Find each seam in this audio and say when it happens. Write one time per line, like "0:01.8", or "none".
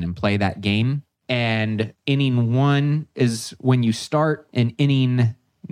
0:01.1
0:02.0
0:04.5